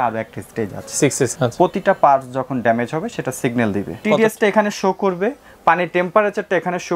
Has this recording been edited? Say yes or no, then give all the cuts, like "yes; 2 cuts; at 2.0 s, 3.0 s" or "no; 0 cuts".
yes; 2 cuts; at 1.3 s, 4.0 s